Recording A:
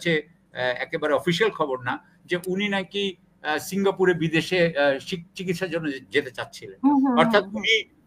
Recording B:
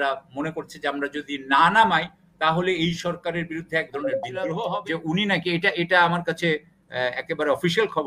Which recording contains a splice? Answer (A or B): B